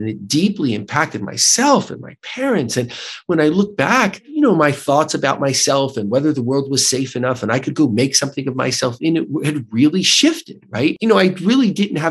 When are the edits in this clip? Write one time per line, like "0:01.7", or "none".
0:04.3
0:11.0